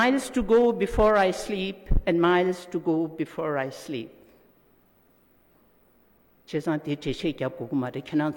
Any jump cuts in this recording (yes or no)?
no